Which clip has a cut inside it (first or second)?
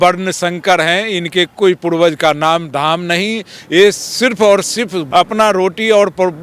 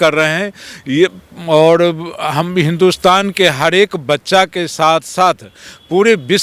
first